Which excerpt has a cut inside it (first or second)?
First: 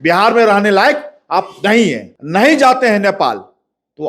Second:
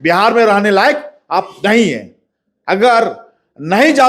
first